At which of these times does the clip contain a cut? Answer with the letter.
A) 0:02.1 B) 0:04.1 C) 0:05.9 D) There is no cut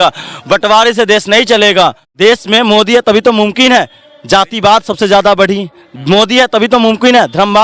A